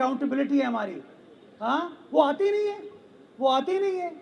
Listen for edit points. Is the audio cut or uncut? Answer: uncut